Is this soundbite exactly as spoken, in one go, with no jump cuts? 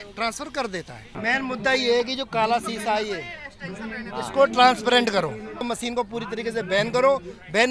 no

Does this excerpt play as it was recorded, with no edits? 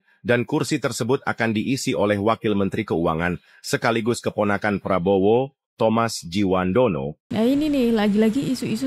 yes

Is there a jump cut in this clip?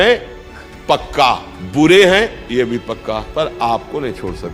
yes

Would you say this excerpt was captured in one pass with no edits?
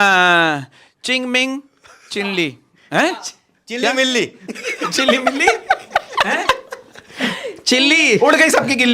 yes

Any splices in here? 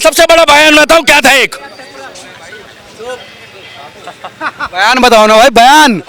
no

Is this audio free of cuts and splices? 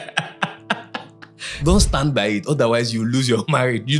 no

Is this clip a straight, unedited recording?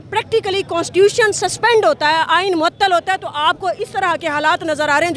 yes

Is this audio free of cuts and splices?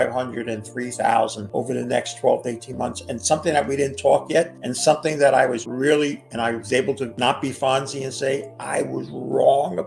no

